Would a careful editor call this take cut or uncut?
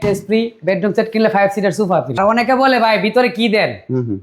cut